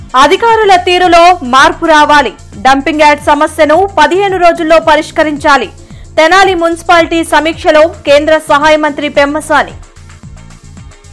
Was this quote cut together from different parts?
no; 0 cuts

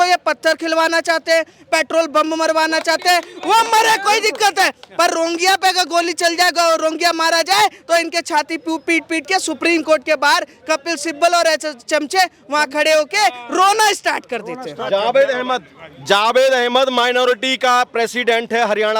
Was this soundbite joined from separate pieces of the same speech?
no; 0 cuts

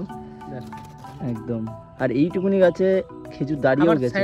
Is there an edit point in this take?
yes; 1 cut; at 1.8 s

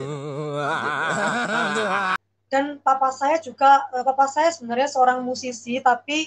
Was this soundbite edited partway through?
yes; 1 cut; at 2.1 s

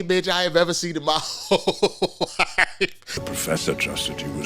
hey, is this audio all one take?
no; 1 cut; at 3.1 s

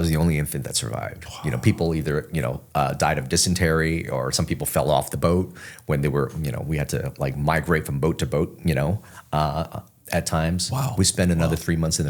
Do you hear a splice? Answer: no; 0 cuts

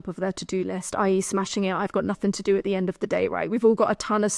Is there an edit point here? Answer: no; 0 cuts

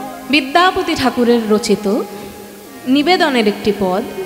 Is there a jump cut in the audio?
no; 0 cuts

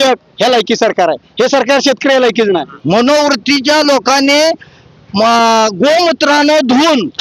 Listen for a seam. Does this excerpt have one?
yes; 1 cut; at 2.7 s

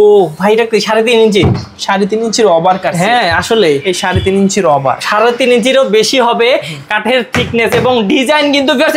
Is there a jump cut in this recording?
no; 0 cuts

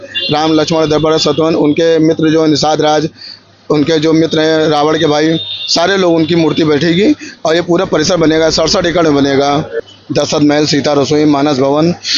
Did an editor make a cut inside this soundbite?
yes; 1 cut; at 9.8 s

